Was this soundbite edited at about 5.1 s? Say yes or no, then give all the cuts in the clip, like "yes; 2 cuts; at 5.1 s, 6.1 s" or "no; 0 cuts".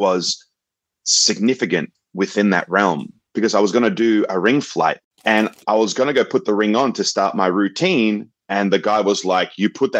yes; 1 cut; at 5.1 s